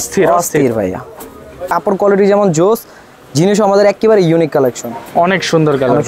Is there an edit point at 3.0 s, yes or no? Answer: no